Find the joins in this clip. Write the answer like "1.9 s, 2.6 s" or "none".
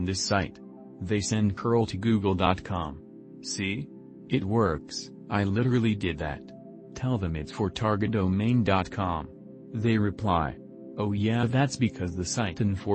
none